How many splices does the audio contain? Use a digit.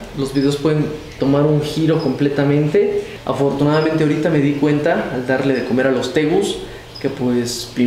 1